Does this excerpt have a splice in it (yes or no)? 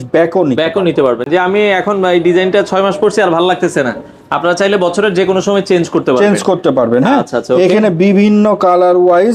no